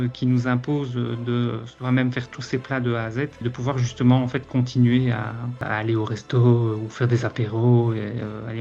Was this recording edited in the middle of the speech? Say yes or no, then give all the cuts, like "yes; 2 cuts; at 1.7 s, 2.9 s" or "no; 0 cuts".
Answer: no; 0 cuts